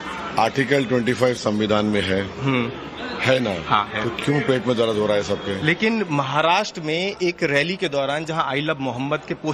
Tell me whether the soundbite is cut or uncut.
cut